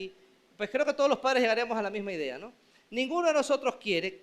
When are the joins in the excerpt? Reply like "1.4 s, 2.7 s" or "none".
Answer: none